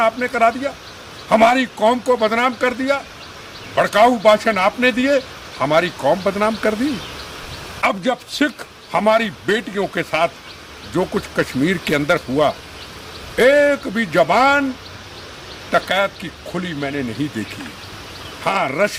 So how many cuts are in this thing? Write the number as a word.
zero